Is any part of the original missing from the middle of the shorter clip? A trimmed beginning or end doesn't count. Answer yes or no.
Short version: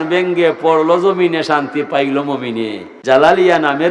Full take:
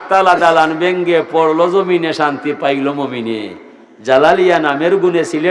yes